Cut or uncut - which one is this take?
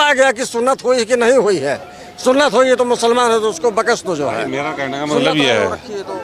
uncut